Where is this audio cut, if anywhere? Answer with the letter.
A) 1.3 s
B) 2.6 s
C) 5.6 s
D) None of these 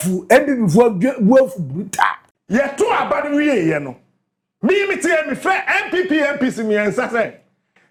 D